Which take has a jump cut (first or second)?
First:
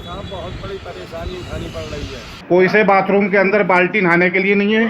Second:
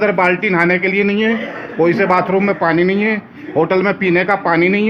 first